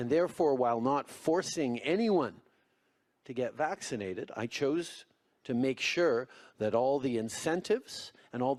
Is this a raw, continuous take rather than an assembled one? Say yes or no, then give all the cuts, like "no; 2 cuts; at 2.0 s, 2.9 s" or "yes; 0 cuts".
yes; 0 cuts